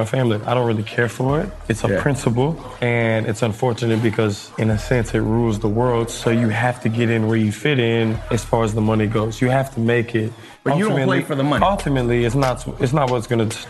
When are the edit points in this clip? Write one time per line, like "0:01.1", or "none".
0:02.7
0:04.5
0:08.2
0:10.4

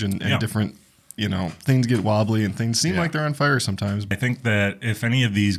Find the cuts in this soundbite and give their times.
0:04.1

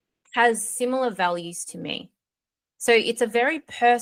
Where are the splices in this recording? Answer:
none

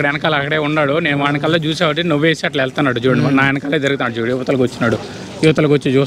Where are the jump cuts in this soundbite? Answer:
none

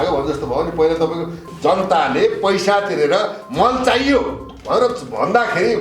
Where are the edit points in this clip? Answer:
0:01.4

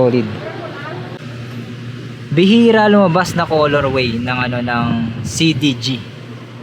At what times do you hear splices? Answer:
0:01.2

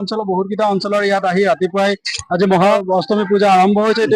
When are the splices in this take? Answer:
0:02.7

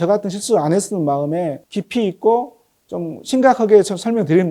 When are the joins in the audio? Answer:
none

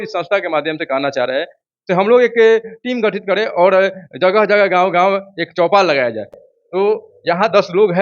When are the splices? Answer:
0:06.4

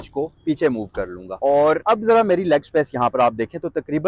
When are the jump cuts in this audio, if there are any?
0:01.2
0:01.8

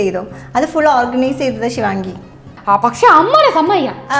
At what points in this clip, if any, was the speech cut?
0:02.5

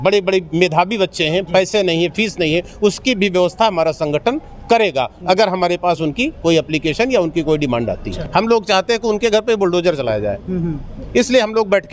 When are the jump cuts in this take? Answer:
0:08.1

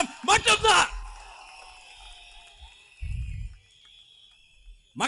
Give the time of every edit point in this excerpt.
none

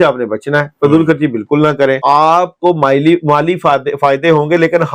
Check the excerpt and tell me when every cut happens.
0:02.0

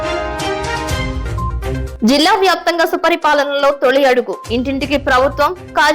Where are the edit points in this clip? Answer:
0:01.9

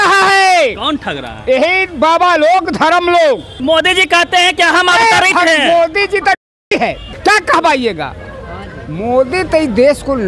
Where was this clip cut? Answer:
none

